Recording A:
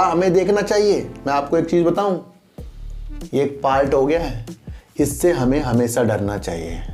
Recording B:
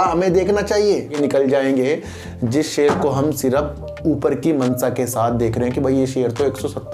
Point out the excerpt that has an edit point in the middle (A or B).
B